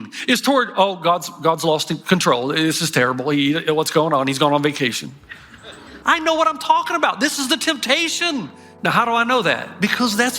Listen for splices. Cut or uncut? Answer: cut